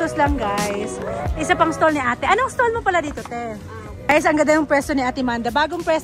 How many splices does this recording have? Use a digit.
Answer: 1